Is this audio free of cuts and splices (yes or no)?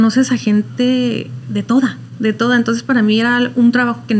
yes